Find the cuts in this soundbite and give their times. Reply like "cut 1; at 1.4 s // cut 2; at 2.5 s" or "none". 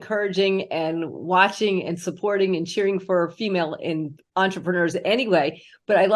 none

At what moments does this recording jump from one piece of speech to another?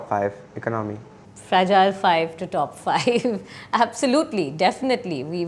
none

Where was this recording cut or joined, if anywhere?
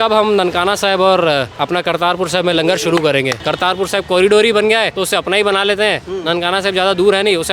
cut 1; at 3.3 s // cut 2; at 4.9 s

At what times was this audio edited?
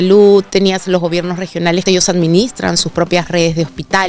cut 1; at 1.8 s

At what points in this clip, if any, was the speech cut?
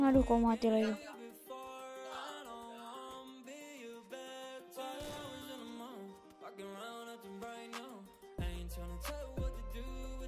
cut 1; at 1.0 s

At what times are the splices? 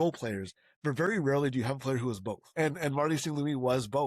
cut 1; at 2.4 s

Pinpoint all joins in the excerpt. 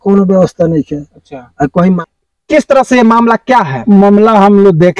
cut 1; at 2.0 s

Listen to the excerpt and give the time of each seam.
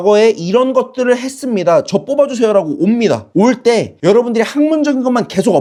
none

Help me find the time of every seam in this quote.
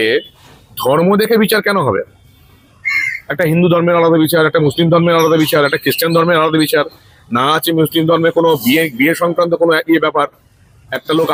none

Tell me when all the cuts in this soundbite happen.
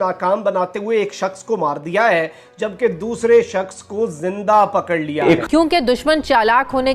cut 1; at 5.3 s

